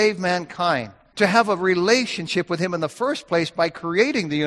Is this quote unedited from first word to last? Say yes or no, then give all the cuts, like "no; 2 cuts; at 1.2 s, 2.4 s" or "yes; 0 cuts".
no; 1 cut; at 1.0 s